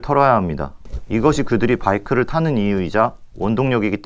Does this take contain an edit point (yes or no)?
no